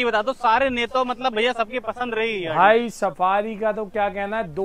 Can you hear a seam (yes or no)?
no